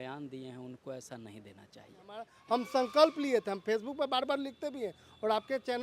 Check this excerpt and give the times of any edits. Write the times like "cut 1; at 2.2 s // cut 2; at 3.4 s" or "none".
cut 1; at 2.3 s